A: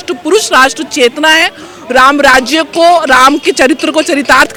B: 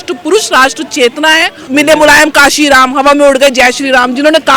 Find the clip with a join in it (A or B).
B